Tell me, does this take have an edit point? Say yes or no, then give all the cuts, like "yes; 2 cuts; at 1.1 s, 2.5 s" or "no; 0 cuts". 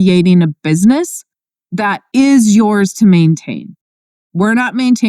yes; 1 cut; at 2.0 s